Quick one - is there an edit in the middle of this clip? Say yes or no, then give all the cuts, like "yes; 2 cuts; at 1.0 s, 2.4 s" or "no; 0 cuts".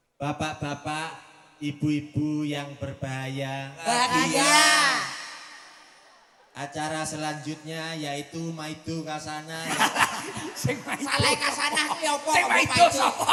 no; 0 cuts